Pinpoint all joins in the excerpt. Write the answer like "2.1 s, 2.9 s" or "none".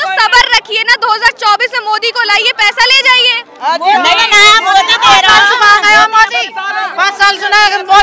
none